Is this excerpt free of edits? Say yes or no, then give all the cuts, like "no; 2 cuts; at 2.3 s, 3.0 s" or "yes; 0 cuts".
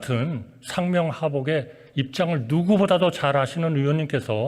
yes; 0 cuts